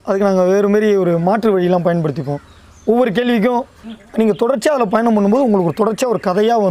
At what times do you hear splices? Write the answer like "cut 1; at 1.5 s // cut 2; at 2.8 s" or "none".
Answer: cut 1; at 3.7 s